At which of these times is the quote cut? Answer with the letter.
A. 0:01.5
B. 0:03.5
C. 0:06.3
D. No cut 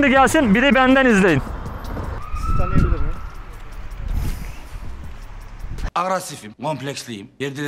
D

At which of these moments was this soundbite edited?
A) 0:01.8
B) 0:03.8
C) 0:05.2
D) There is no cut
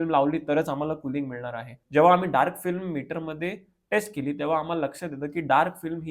A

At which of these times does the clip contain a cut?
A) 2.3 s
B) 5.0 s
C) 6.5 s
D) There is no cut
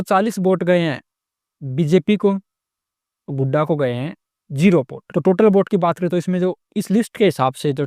B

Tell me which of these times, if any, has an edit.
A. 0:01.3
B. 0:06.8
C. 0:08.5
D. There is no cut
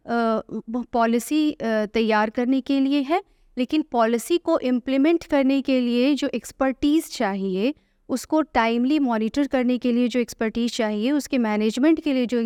D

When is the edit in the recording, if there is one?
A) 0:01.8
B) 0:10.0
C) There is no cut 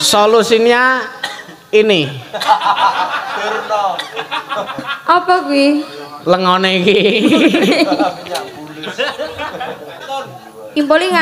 B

